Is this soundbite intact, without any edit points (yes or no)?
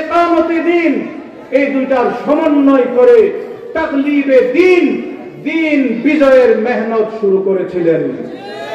yes